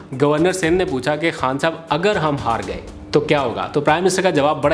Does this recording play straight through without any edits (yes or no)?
yes